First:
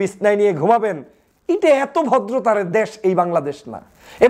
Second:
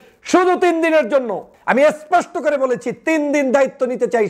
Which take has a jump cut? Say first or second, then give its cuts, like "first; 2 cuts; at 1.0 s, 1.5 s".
second; 1 cut; at 1.5 s